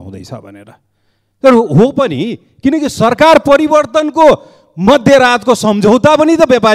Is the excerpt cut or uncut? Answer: uncut